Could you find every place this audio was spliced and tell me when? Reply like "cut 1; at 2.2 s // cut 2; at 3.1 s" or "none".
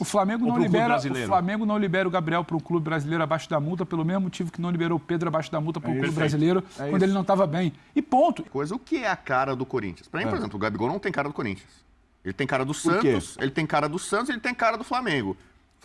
cut 1; at 8.4 s